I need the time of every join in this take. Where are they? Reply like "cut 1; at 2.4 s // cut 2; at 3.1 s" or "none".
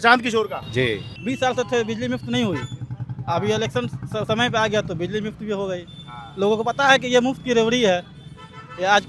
cut 1; at 1.1 s